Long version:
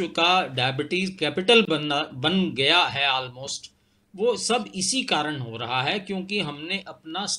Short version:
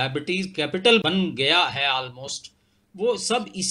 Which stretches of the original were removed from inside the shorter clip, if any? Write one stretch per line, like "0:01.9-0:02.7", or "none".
0:01.7-0:02.2